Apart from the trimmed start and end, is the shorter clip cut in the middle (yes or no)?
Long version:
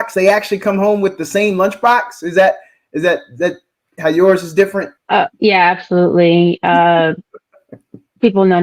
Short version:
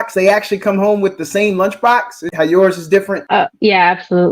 yes